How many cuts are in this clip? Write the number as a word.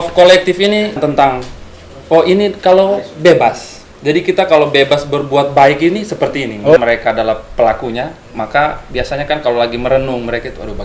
two